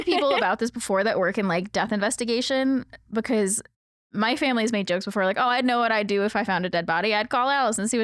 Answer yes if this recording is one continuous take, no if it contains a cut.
yes